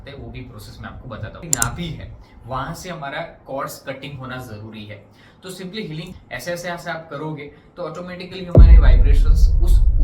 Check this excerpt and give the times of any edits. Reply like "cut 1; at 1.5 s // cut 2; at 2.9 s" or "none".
cut 1; at 1.4 s // cut 2; at 6.1 s

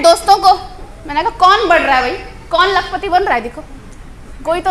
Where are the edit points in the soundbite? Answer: none

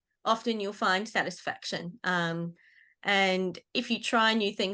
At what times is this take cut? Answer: none

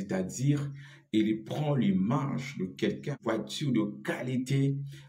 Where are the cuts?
cut 1; at 3.2 s

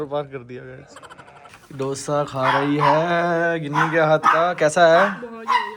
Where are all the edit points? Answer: none

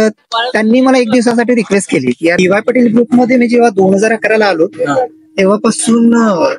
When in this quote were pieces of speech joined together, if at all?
cut 1; at 2.4 s

